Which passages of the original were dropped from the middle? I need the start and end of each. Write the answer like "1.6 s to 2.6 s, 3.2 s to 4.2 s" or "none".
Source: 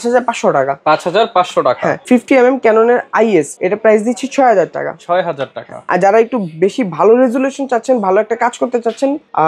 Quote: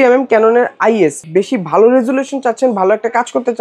3.5 s to 6.5 s